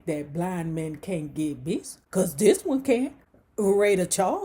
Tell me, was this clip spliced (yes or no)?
yes